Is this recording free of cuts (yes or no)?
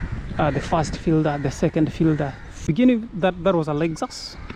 no